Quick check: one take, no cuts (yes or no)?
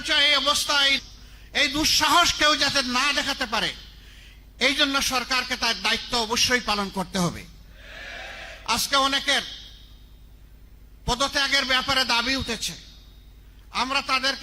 no